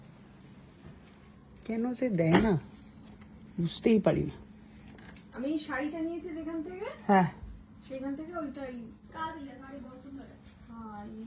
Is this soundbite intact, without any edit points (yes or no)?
yes